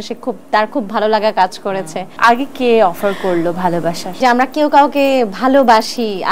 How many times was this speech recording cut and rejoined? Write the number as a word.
two